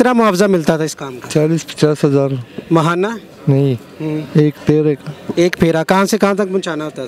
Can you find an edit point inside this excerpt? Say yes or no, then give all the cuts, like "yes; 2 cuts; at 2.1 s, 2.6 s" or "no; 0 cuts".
no; 0 cuts